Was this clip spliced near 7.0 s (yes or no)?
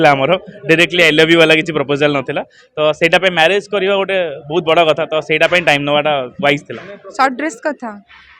yes